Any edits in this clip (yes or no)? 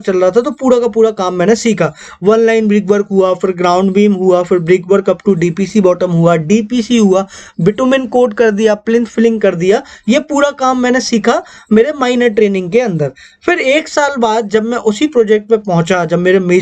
no